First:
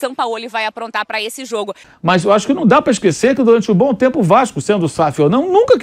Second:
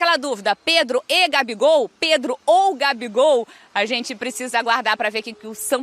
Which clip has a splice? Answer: first; 1 cut; at 1.7 s

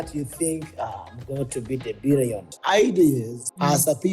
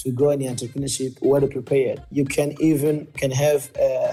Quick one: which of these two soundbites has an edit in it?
first; 1 cut; at 2.5 s

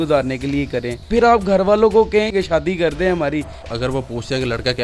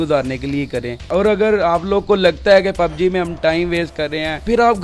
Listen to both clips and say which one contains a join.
first; 3 cuts; at 1.0 s, 2.3 s, 3.6 s

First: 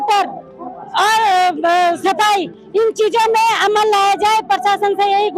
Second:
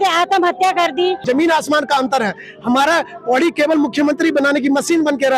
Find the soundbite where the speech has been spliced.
second; 1 cut; at 1.2 s

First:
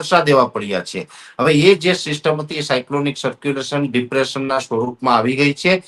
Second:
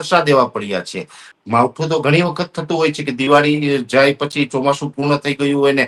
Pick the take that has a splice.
second; 1 cut; at 1.2 s

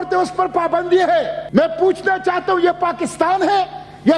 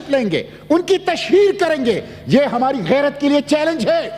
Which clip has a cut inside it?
first; 1 cut; at 1.4 s

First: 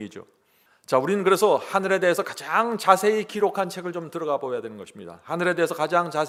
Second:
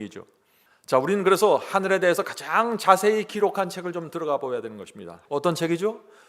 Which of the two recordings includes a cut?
second; 1 cut; at 5.2 s

